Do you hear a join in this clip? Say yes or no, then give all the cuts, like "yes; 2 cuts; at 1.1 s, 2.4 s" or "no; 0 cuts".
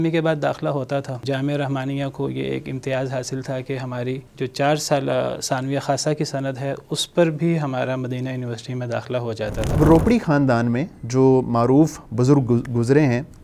yes; 3 cuts; at 1.2 s, 4.3 s, 9.7 s